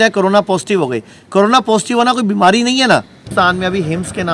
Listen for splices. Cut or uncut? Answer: cut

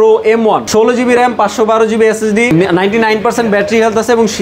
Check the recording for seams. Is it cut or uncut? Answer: uncut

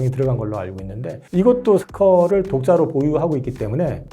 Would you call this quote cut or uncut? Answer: cut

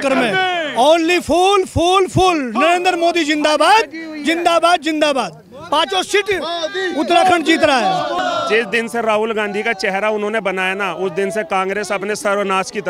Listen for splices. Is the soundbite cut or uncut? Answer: cut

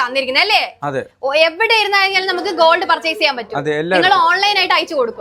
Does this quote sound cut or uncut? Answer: uncut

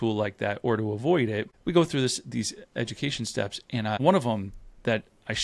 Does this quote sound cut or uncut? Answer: cut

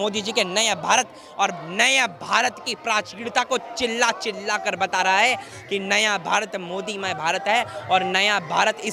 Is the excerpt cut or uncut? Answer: uncut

